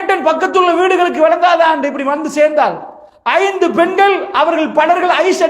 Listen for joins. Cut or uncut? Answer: uncut